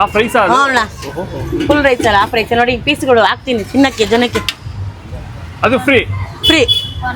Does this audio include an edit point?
no; 0 cuts

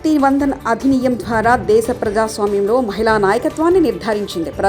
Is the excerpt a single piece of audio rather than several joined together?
yes; 0 cuts

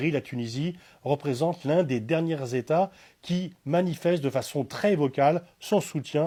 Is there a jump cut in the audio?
no; 0 cuts

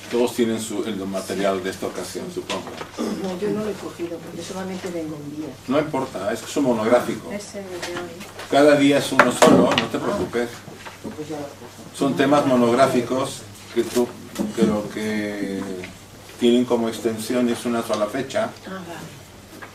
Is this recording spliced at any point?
no; 0 cuts

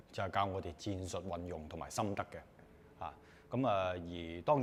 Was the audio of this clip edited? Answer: no; 0 cuts

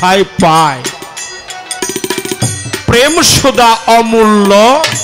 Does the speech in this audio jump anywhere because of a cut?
no; 0 cuts

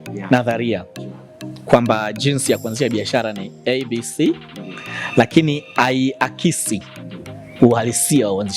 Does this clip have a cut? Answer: no; 0 cuts

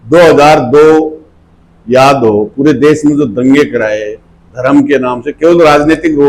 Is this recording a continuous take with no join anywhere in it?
yes; 0 cuts

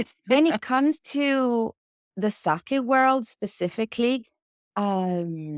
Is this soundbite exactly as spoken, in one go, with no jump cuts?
yes; 0 cuts

